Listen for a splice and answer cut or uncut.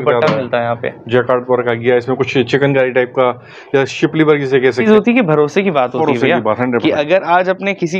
cut